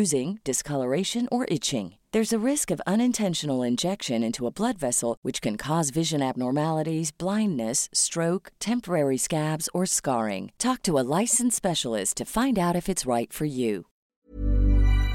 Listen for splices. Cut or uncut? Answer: cut